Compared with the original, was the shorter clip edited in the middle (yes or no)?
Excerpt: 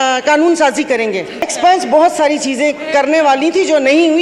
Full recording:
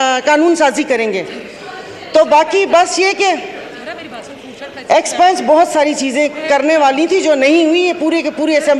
yes